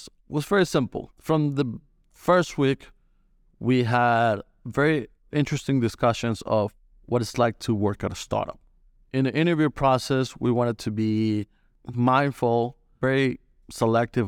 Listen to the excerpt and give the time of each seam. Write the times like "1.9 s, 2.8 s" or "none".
8.8 s, 13.0 s